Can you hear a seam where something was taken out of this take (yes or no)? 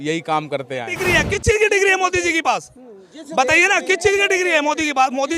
yes